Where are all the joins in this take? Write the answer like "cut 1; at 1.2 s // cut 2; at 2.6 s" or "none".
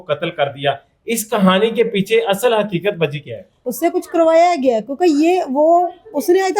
cut 1; at 3.6 s